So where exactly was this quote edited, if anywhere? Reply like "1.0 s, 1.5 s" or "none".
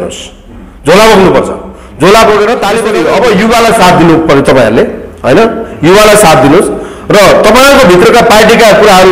2.9 s